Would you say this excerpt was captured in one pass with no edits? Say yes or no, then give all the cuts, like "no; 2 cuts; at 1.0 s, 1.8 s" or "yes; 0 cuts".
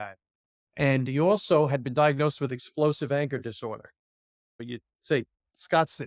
yes; 0 cuts